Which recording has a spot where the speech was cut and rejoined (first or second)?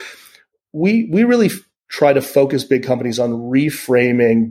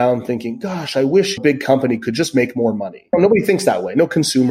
second